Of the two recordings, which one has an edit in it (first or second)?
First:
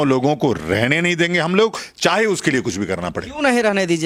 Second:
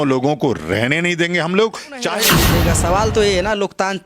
second